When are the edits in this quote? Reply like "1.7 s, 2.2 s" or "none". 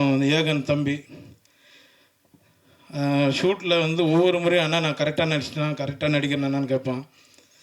none